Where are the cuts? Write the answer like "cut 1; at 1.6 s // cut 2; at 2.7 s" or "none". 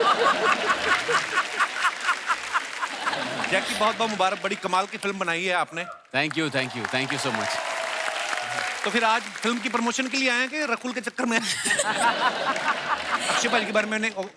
cut 1; at 3.2 s // cut 2; at 13.2 s

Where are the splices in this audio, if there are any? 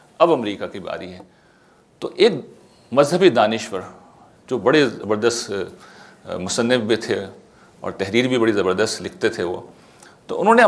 none

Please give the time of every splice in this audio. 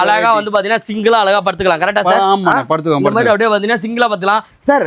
none

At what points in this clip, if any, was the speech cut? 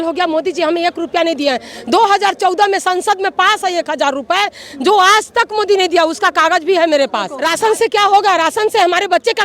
cut 1; at 7.4 s

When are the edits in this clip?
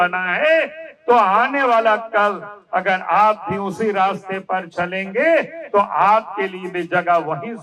none

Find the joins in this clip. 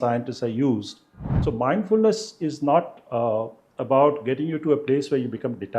cut 1; at 1.4 s

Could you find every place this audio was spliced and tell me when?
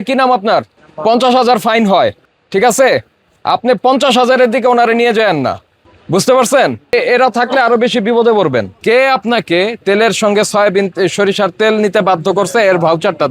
cut 1; at 6.9 s // cut 2; at 8.7 s // cut 3; at 9.8 s

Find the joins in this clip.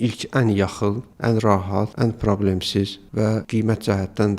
cut 1; at 1.1 s // cut 2; at 1.9 s // cut 3; at 3.1 s

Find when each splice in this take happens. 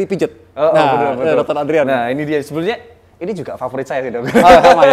none

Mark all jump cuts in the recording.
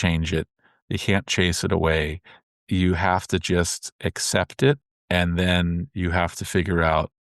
cut 1; at 4.9 s

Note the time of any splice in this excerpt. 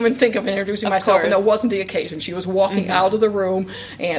none

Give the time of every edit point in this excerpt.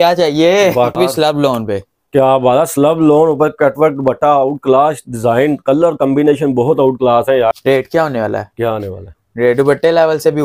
cut 1; at 1.0 s // cut 2; at 7.6 s

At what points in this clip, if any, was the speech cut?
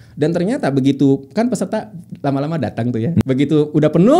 cut 1; at 3.2 s

